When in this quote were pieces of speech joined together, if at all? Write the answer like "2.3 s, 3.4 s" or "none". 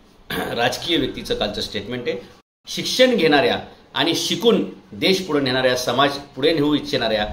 2.4 s